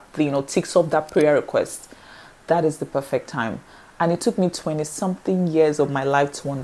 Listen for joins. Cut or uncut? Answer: uncut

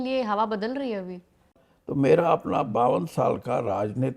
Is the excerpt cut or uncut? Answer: cut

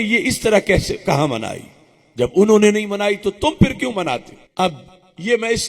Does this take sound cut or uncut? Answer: cut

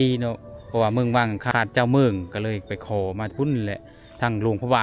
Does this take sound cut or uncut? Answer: cut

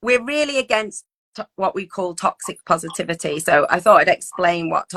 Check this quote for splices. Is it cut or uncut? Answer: uncut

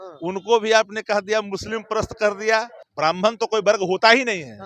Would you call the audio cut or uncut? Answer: cut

